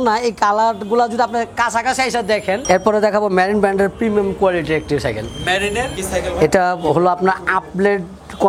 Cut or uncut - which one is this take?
cut